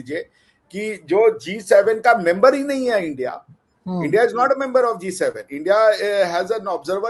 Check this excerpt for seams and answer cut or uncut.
uncut